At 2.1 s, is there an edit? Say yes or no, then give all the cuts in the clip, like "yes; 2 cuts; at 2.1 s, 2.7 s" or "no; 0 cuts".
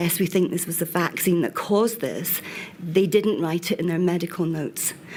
no; 0 cuts